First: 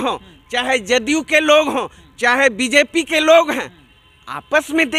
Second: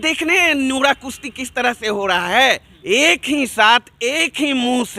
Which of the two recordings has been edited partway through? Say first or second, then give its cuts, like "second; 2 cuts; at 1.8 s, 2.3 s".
second; 1 cut; at 2.7 s